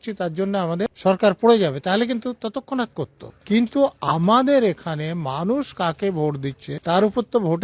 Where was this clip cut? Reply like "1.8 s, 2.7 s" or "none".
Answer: 0.9 s, 3.3 s, 6.7 s